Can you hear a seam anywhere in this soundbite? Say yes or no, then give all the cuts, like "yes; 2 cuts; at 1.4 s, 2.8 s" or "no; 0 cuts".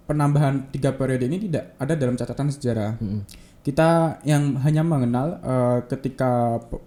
no; 0 cuts